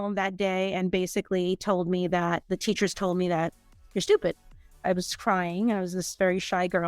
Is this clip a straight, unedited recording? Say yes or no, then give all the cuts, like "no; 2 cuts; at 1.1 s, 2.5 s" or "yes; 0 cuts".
no; 1 cut; at 4.8 s